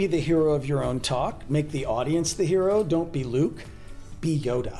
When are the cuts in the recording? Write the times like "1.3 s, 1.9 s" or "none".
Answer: none